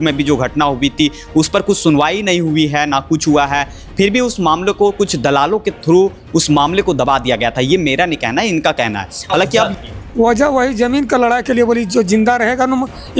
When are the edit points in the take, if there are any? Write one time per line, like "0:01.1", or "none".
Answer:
0:09.7